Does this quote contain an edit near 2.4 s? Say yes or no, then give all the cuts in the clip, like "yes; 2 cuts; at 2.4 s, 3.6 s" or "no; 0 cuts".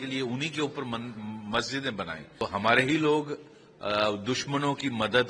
yes; 1 cut; at 2.4 s